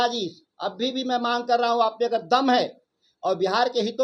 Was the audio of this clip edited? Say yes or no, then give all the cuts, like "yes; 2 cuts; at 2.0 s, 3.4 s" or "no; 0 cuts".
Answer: no; 0 cuts